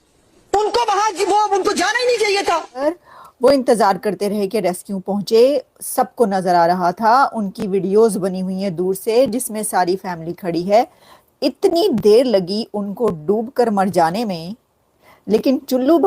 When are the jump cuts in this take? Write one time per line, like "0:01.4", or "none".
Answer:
0:02.8